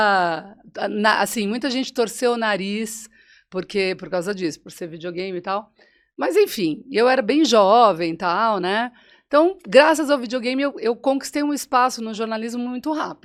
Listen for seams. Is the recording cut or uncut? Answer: uncut